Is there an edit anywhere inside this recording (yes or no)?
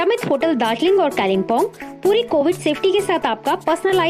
no